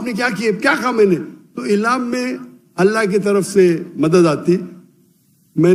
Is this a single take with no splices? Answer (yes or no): yes